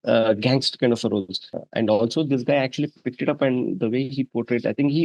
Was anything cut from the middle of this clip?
yes; 1 cut; at 1.6 s

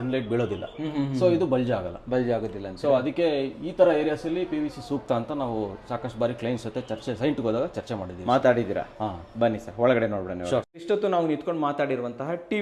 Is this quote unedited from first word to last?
yes; 0 cuts

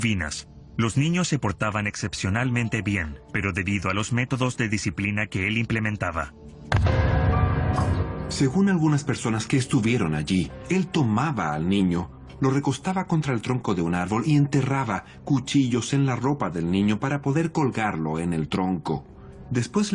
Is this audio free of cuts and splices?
no; 1 cut; at 17.0 s

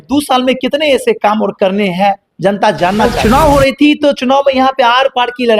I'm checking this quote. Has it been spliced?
yes; 1 cut; at 3.1 s

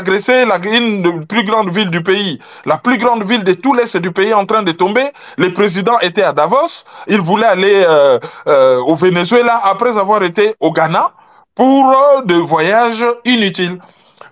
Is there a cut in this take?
no; 0 cuts

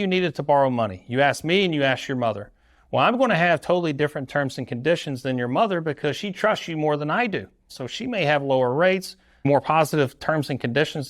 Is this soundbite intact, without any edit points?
no; 2 cuts; at 7.8 s, 9.3 s

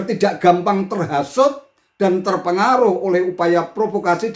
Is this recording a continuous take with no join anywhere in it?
yes; 0 cuts

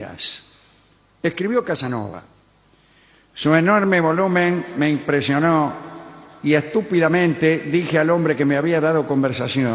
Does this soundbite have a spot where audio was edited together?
yes; 1 cut; at 3.0 s

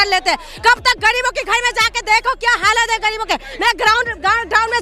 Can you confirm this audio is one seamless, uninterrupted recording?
yes; 0 cuts

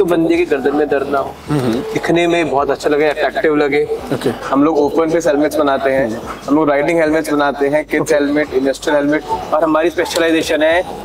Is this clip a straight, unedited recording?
no; 1 cut; at 4.4 s

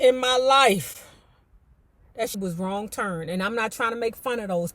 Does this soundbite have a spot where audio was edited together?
yes; 1 cut; at 2.4 s

